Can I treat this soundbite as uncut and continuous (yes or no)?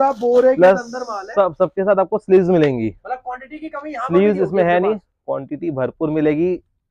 yes